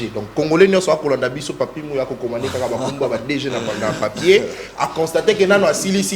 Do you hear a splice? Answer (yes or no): no